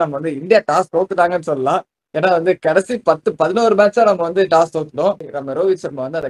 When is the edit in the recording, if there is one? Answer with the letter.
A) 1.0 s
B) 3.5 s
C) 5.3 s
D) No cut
C